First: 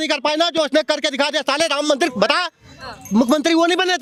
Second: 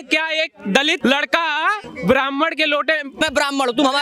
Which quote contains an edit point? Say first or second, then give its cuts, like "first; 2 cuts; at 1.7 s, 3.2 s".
second; 3 cuts; at 1.0 s, 1.9 s, 3.2 s